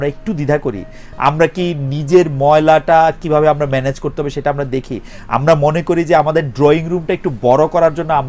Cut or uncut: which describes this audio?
uncut